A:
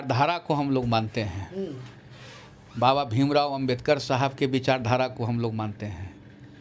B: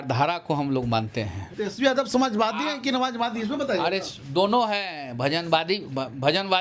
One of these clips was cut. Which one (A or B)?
B